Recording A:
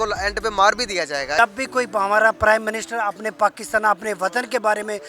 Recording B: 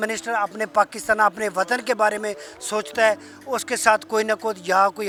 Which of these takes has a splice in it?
A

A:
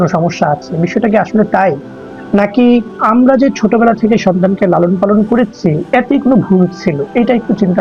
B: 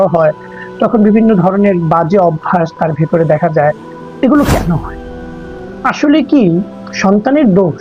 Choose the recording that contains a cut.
A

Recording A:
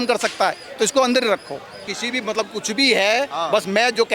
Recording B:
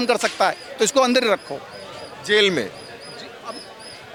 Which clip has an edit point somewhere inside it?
A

